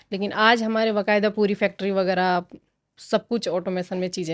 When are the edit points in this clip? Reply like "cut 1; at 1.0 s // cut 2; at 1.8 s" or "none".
none

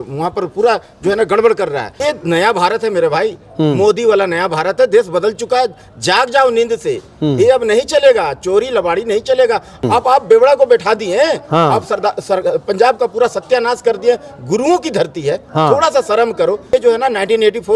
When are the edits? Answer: cut 1; at 2.0 s // cut 2; at 9.8 s // cut 3; at 16.7 s

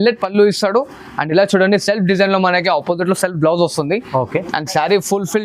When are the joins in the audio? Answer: none

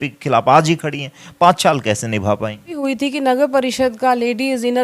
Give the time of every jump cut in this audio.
cut 1; at 2.8 s

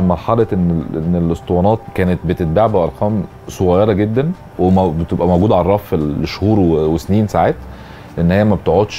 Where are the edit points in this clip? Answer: cut 1; at 1.9 s // cut 2; at 4.4 s

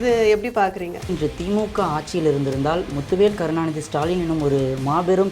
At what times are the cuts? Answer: cut 1; at 1.1 s

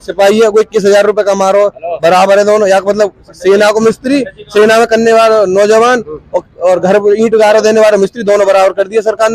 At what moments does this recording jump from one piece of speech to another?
none

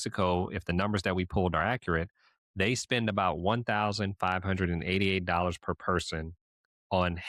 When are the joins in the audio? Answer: none

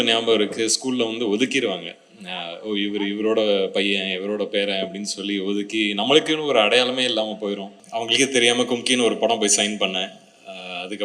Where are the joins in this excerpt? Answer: cut 1; at 7.8 s

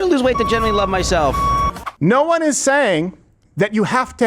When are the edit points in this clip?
cut 1; at 1.8 s

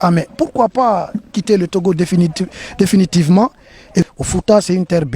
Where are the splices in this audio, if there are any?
cut 1; at 4.1 s

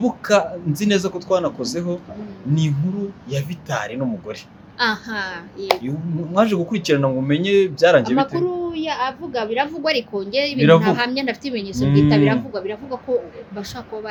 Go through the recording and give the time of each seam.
none

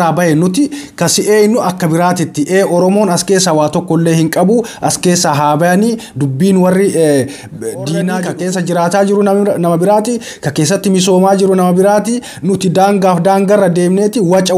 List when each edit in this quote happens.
cut 1; at 8.1 s

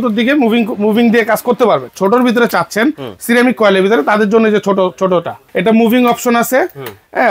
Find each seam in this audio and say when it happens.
cut 1; at 1.9 s // cut 2; at 5.4 s

